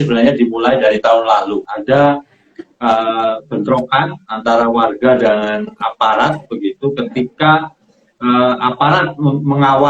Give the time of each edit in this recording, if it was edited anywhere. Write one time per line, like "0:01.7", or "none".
0:01.7